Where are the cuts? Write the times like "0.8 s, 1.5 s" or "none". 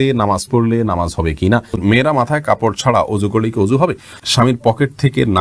1.8 s, 4.2 s